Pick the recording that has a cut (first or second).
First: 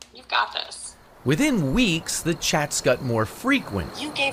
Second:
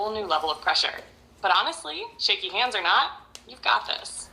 second